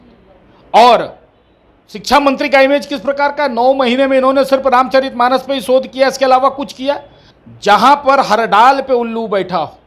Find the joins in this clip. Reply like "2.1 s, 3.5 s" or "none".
7.2 s